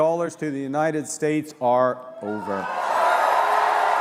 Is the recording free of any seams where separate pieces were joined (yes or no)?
yes